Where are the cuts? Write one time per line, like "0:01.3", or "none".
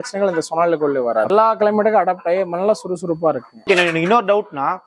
0:01.3
0:03.7